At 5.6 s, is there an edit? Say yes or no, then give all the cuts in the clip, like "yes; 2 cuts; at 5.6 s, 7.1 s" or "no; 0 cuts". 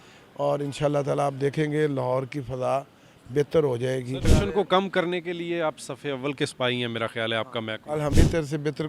no; 2 cuts; at 4.3 s, 8.1 s